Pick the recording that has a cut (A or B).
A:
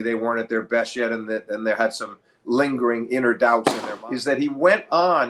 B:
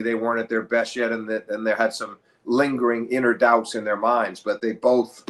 A